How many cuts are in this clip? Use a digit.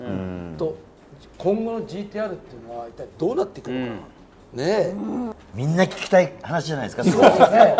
1